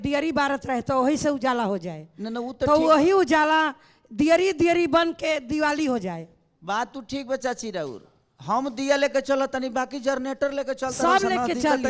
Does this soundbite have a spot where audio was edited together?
no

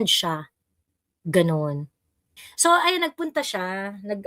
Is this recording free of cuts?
no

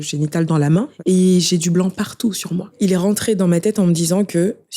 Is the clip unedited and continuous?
no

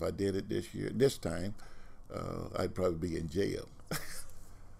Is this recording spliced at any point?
no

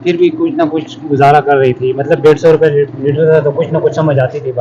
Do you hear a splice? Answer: no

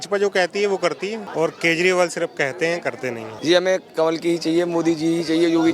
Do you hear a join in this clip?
yes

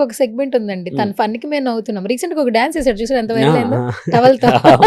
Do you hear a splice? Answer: no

